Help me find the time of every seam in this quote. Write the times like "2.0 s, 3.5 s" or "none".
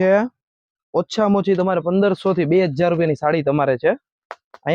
none